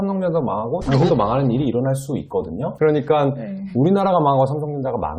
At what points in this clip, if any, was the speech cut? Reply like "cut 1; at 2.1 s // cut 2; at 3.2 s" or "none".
cut 1; at 2.7 s